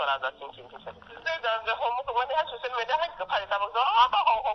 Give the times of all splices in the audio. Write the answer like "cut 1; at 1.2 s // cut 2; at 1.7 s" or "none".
cut 1; at 1.2 s